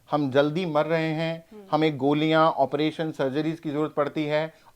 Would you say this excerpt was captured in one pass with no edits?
yes; 0 cuts

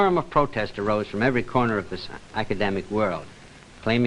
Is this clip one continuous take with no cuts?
yes; 0 cuts

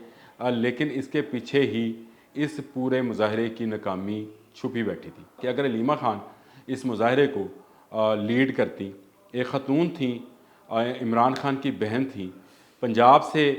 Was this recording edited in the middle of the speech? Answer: yes; 1 cut; at 5.3 s

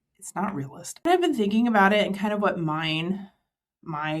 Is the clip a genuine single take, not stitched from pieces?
no; 1 cut; at 1.1 s

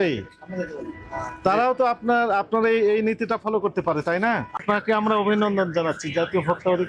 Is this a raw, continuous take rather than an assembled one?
no; 1 cut; at 4.6 s

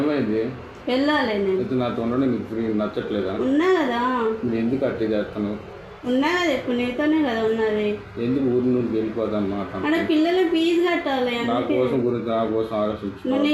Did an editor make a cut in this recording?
no; 0 cuts

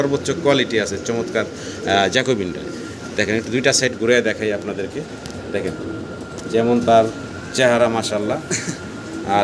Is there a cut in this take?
no; 0 cuts

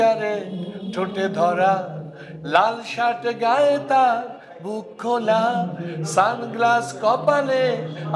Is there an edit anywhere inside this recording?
no; 0 cuts

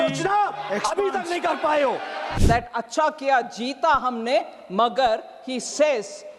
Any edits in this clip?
yes; 1 cut; at 2.3 s

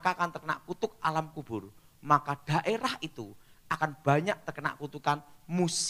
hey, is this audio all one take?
yes; 0 cuts

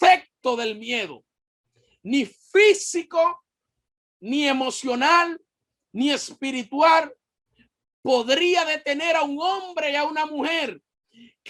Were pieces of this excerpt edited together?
no; 0 cuts

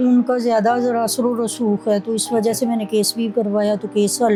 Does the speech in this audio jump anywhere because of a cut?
no; 0 cuts

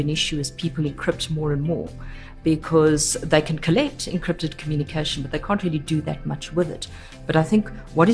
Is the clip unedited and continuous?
yes; 0 cuts

